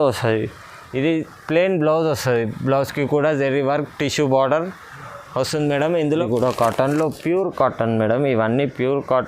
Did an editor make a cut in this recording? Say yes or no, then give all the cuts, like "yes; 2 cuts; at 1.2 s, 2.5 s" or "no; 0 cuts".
yes; 1 cut; at 6.3 s